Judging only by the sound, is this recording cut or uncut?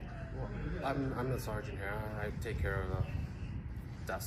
uncut